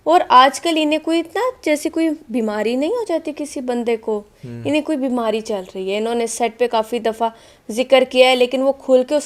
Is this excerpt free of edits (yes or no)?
yes